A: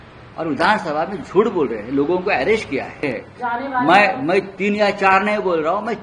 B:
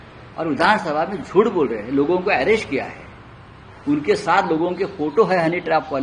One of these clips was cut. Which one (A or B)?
A